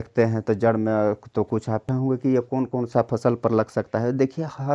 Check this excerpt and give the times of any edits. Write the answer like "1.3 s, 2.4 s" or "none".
1.9 s